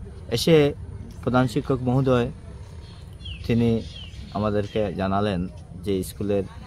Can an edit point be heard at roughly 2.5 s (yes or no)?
no